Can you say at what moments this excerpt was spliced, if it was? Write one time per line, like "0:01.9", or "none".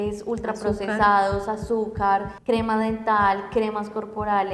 0:02.3

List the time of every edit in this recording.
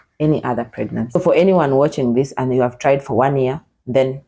0:01.2

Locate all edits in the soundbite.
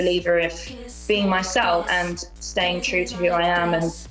0:01.9

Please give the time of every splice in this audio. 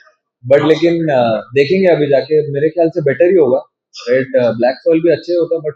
none

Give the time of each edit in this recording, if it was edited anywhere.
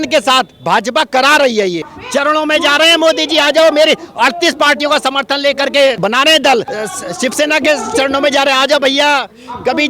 0:01.9
0:06.6

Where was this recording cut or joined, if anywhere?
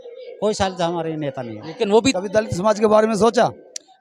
0:02.1

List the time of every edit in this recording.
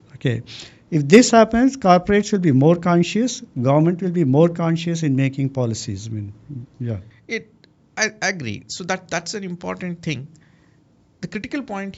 none

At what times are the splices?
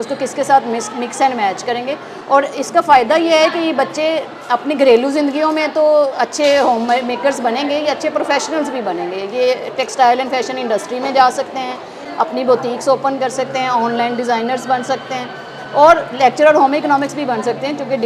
none

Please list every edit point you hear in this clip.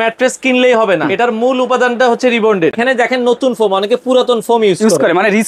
0:01.1
0:02.8

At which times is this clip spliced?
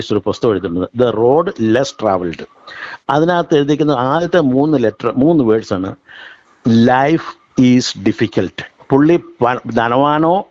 none

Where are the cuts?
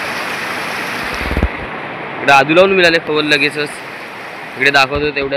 none

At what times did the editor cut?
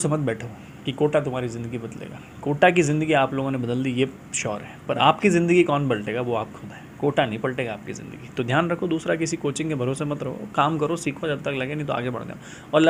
none

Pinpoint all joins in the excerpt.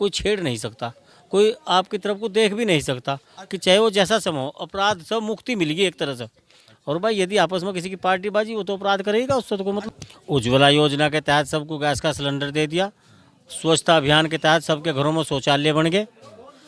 none

